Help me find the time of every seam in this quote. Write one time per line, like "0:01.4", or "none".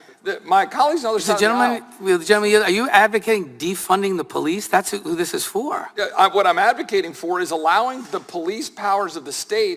none